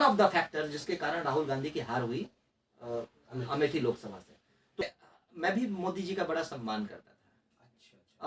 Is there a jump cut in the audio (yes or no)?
yes